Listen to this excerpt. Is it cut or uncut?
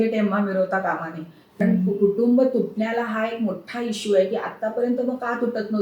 cut